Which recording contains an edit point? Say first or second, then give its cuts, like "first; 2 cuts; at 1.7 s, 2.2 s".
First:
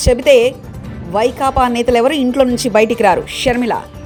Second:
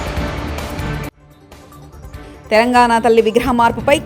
second; 2 cuts; at 1.2 s, 1.9 s